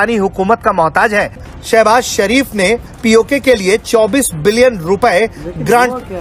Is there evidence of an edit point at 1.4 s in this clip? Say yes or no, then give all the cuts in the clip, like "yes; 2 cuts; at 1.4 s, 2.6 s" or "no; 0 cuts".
yes; 1 cut; at 1.4 s